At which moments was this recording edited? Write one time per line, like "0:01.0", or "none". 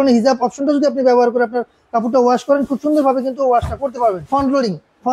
0:04.2